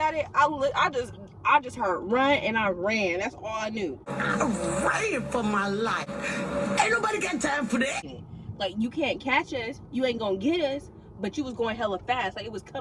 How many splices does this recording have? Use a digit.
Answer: 3